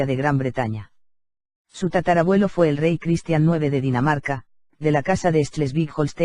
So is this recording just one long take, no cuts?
no; 1 cut; at 4.2 s

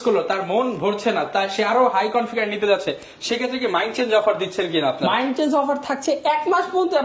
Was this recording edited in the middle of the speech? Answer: no; 0 cuts

